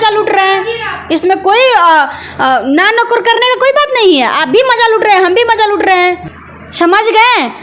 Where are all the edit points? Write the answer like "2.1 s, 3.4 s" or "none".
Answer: 6.3 s